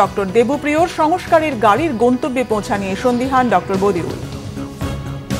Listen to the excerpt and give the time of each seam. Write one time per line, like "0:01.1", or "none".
0:04.3